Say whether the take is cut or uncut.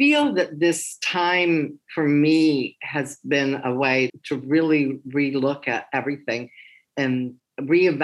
uncut